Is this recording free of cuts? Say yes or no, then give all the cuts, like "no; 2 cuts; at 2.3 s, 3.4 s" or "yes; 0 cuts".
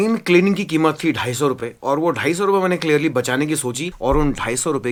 yes; 0 cuts